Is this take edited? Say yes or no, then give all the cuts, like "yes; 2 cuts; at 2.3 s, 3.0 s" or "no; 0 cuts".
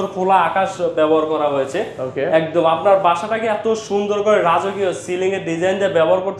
no; 0 cuts